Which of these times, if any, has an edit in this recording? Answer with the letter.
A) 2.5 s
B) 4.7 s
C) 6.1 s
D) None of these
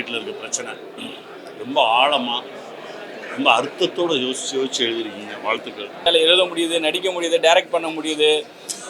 C